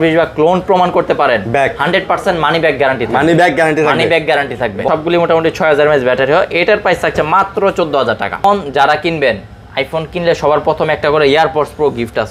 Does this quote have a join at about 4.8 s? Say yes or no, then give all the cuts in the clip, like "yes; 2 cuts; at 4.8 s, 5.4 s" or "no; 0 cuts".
yes; 2 cuts; at 4.8 s, 8.4 s